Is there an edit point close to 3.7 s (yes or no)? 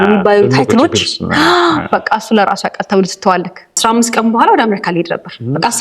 yes